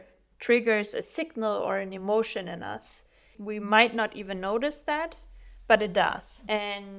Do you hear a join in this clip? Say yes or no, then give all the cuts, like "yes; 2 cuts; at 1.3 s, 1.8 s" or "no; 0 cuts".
yes; 1 cut; at 3.3 s